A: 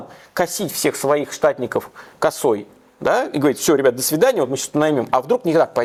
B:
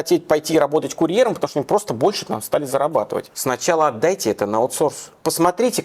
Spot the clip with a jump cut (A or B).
B